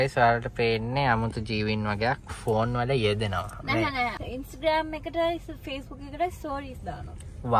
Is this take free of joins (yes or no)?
no